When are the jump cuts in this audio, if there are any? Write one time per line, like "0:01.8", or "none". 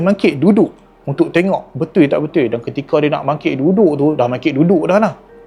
none